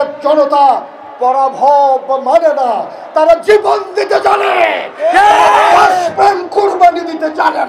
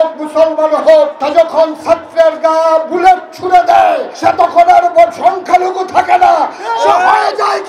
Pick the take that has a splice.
second; 2 cuts; at 1.2 s, 4.1 s

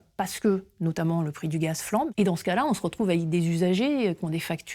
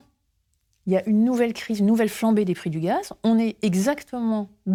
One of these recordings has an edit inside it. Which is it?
first; 1 cut; at 2.1 s

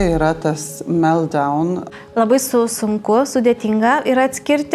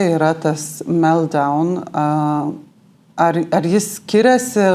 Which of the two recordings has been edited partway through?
first; 1 cut; at 1.9 s

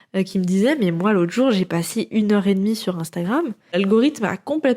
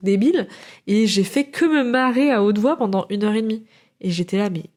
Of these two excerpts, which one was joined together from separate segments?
first; 1 cut; at 3.7 s

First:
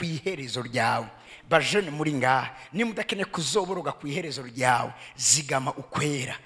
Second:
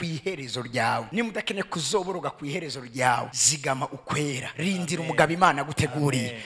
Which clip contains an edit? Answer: second; 3 cuts; at 1.1 s, 3.4 s, 4.5 s

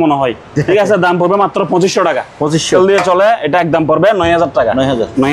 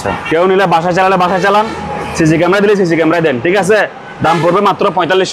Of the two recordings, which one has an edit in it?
first; 1 cut; at 2.7 s

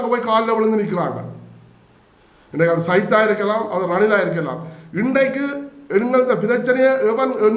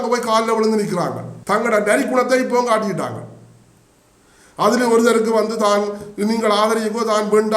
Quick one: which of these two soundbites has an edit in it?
second; 1 cut; at 1.3 s

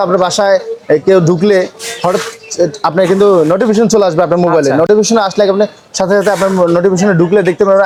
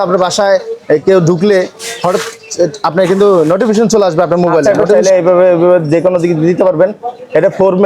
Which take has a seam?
second; 1 cut; at 4.8 s

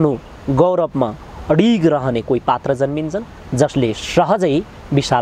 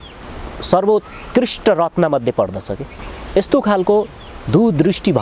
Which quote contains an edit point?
second; 1 cut; at 2.8 s

